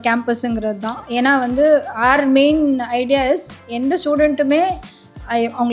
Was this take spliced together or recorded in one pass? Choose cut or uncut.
uncut